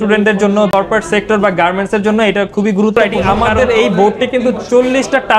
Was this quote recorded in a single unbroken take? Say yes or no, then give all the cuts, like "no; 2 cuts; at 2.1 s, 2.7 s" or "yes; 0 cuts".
no; 1 cut; at 3.0 s